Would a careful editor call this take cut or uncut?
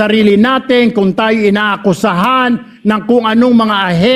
uncut